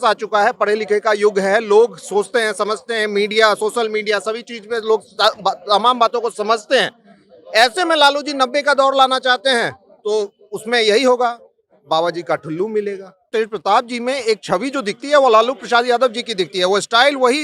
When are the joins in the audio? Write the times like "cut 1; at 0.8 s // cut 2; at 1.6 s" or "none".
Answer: cut 1; at 13.2 s